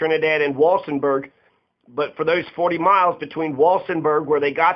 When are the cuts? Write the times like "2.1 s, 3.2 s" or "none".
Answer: none